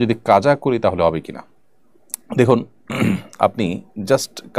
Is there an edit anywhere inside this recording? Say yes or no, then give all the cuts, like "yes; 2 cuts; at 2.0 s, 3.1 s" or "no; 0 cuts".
no; 0 cuts